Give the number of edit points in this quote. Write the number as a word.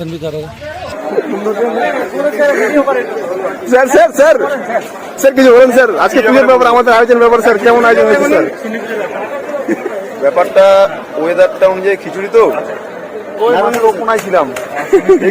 one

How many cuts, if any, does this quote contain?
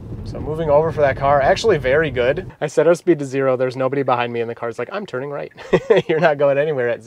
one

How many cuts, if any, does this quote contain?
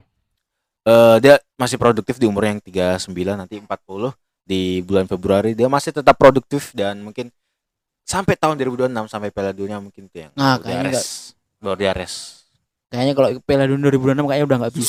zero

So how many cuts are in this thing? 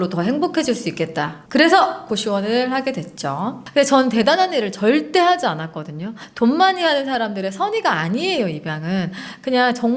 one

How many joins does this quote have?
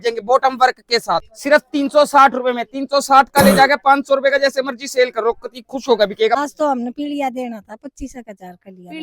two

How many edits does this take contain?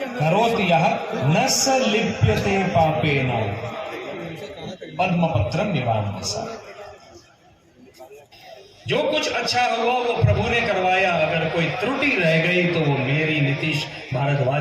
one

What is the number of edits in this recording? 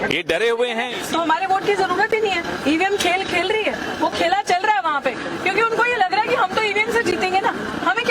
two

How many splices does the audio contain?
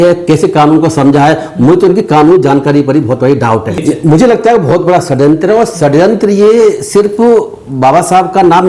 one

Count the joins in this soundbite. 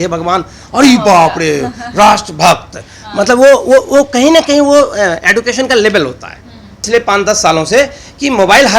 one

